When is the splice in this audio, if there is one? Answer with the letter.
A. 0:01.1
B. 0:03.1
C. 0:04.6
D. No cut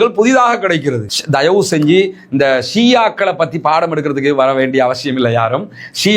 A